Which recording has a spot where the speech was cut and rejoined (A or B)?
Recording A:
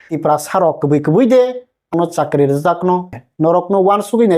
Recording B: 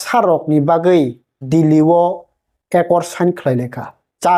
A